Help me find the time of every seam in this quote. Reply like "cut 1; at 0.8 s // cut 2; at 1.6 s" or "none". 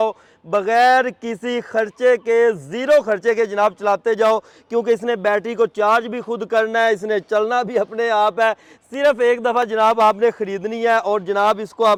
none

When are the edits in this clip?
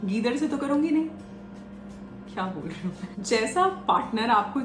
cut 1; at 3.2 s

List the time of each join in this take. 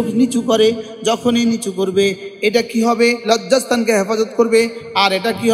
cut 1; at 3.2 s

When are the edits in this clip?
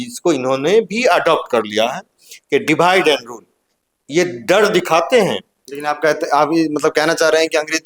none

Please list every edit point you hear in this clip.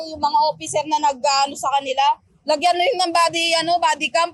none

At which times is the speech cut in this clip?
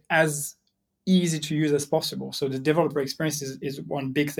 none

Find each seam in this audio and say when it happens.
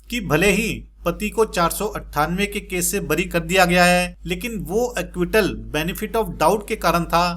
cut 1; at 4.2 s

